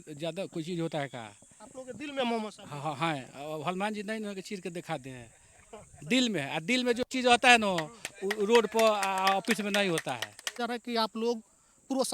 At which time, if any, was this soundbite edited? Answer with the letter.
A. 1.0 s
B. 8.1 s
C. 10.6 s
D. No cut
C